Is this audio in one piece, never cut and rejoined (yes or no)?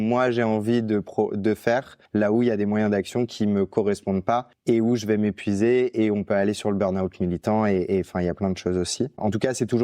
no